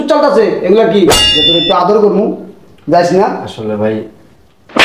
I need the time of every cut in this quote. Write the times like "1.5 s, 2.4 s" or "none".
1.2 s